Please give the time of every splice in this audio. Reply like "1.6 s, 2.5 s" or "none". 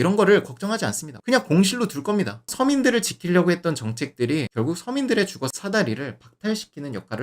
1.2 s, 2.4 s